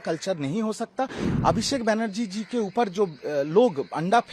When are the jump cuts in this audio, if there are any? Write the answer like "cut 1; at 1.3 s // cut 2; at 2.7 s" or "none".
cut 1; at 1.3 s

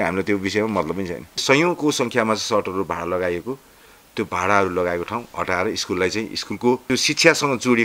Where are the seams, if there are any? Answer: cut 1; at 1.4 s // cut 2; at 6.8 s

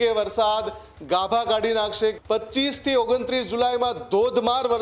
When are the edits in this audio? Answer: cut 1; at 2.2 s

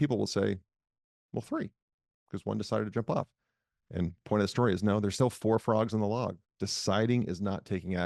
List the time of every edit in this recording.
none

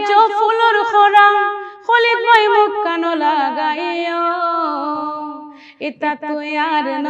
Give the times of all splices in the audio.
none

